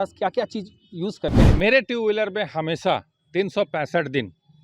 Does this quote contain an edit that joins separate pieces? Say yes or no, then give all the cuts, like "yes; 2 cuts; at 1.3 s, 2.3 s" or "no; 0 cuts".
yes; 1 cut; at 1.5 s